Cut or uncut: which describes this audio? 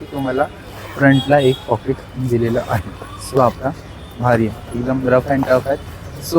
cut